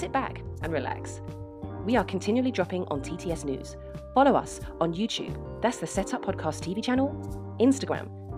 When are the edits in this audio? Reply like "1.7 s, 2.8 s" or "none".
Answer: none